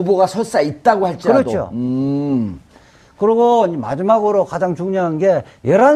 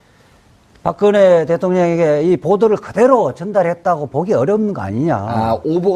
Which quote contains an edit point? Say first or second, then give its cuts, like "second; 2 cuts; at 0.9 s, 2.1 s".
second; 1 cut; at 1.4 s